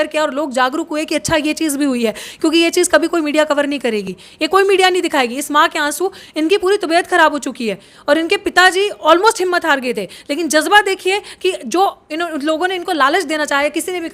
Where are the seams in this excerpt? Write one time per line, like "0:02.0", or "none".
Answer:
none